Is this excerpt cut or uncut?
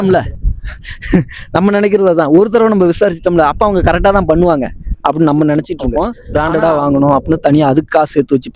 cut